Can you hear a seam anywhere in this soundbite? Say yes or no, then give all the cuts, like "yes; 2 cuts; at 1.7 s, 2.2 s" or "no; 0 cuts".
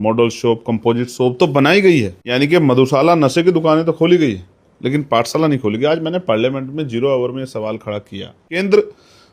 yes; 2 cuts; at 2.2 s, 8.6 s